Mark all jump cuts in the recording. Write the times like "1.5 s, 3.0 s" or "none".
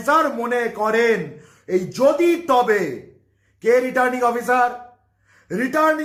none